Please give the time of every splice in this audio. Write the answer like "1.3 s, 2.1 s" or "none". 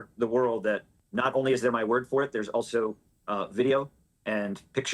none